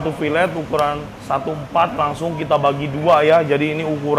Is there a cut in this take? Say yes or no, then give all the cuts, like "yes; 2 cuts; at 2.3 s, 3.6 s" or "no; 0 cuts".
yes; 1 cut; at 1.1 s